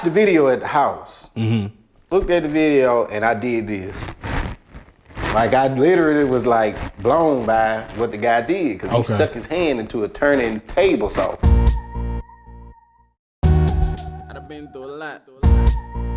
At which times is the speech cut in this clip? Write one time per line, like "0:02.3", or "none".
0:11.4